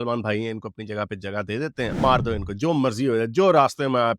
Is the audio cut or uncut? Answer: cut